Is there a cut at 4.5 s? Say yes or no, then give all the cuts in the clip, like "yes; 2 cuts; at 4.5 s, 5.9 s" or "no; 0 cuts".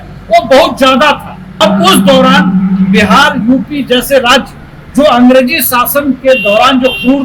no; 1 cut; at 1.6 s